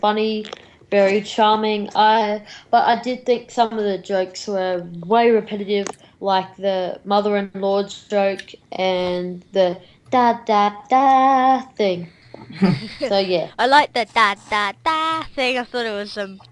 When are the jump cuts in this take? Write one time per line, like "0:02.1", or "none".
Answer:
0:15.6